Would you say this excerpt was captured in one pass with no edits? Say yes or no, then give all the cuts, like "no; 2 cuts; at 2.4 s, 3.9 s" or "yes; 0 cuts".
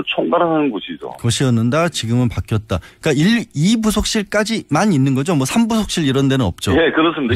no; 1 cut; at 5.2 s